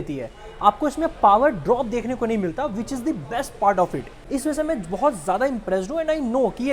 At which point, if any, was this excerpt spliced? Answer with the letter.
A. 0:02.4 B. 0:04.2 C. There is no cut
C